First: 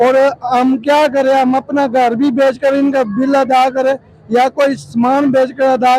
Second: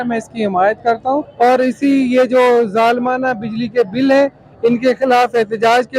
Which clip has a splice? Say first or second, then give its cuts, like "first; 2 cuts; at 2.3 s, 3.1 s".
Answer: second; 1 cut; at 1.3 s